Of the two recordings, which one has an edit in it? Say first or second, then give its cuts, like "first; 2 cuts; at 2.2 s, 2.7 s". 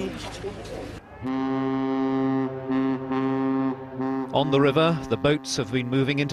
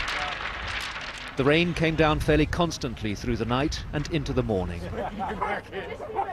first; 1 cut; at 3.3 s